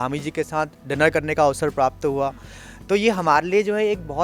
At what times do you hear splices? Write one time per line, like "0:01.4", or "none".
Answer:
none

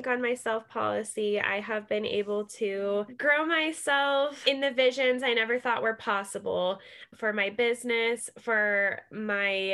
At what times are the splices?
0:07.1

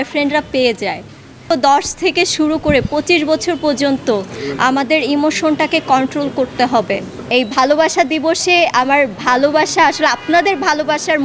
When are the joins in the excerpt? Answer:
0:01.5
0:07.1

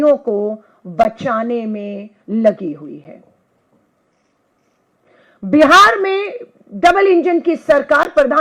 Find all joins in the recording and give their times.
none

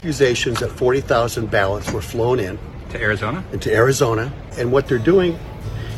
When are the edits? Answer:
0:04.5

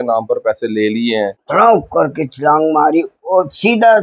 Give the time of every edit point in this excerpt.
0:01.4

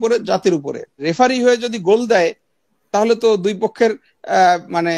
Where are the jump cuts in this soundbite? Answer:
0:01.0

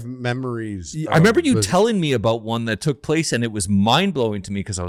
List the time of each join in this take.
none

